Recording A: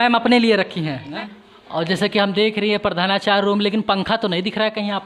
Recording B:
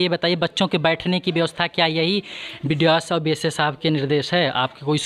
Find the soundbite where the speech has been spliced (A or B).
A